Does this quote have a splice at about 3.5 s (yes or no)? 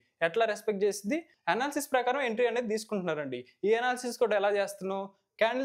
no